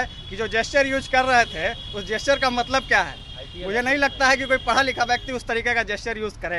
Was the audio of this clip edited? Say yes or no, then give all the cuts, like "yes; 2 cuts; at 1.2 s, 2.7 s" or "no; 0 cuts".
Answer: no; 0 cuts